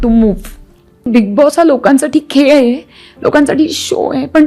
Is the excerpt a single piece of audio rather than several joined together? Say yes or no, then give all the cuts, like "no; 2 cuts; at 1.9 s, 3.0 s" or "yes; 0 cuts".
no; 1 cut; at 1.1 s